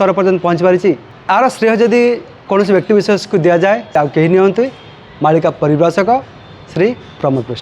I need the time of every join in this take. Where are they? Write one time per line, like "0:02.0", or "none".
0:01.1
0:02.3
0:03.9